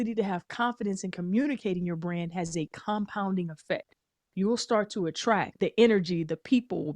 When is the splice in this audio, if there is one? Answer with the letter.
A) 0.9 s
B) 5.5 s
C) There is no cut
B